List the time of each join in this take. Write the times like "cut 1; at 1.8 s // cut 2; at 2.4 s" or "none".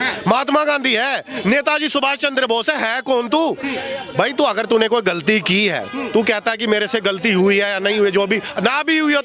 none

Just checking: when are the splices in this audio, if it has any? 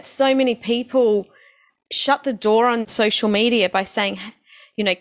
cut 1; at 2.9 s

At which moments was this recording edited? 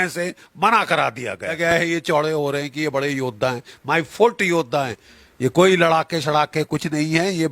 cut 1; at 1.6 s // cut 2; at 5.0 s

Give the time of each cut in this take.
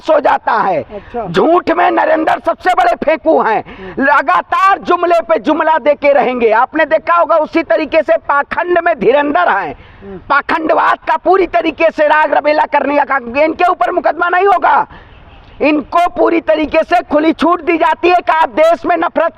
none

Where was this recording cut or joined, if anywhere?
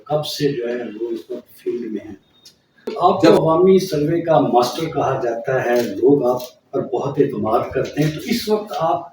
cut 1; at 2.9 s

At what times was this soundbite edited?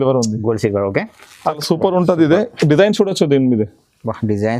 cut 1; at 1.6 s

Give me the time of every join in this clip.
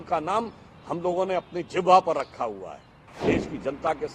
cut 1; at 3.1 s

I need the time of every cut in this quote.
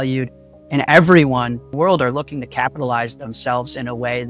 cut 1; at 1.7 s

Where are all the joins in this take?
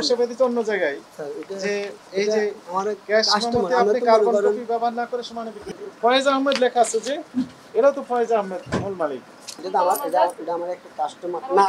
cut 1; at 5.7 s // cut 2; at 9.6 s

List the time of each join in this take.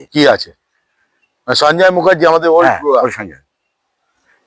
none

